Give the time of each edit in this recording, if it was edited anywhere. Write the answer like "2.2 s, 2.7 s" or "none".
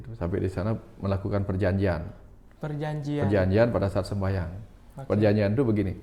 none